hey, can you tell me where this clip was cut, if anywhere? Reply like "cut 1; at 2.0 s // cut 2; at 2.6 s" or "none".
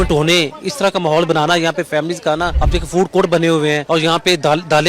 cut 1; at 2.6 s // cut 2; at 3.8 s